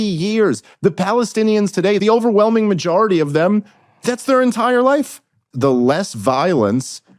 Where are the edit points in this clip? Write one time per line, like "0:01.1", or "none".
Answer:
0:02.0
0:05.4